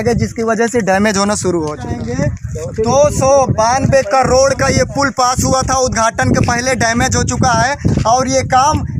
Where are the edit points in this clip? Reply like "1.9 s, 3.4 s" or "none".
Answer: 1.9 s